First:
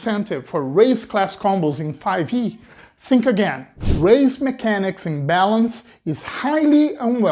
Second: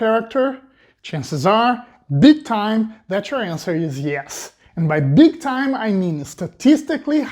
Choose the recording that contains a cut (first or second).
first